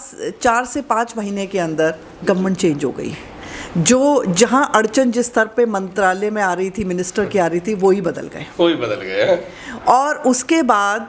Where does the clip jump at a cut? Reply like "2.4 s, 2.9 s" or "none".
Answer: none